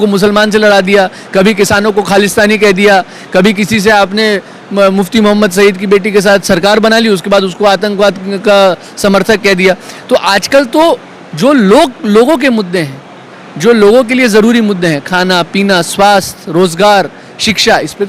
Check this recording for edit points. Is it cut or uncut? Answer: uncut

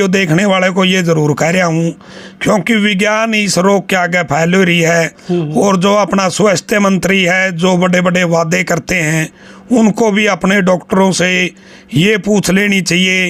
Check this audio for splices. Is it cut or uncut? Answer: uncut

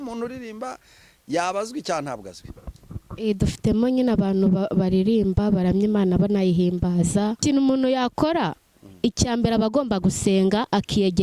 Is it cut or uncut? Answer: cut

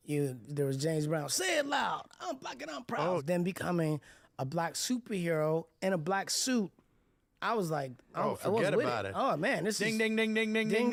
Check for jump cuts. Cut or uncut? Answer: uncut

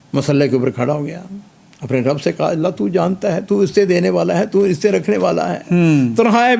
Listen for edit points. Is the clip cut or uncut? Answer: uncut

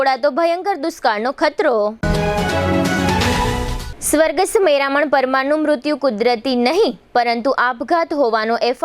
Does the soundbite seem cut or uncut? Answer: uncut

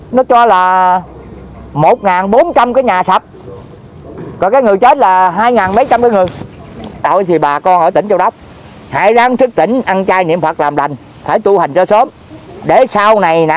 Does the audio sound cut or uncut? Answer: cut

